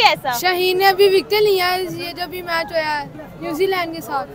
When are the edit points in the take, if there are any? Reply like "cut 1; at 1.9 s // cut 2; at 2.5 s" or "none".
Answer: none